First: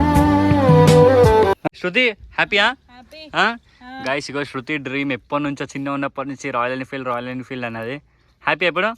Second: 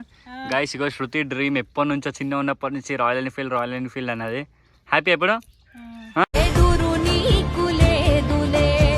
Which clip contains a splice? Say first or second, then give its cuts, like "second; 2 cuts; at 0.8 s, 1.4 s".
first; 1 cut; at 1.7 s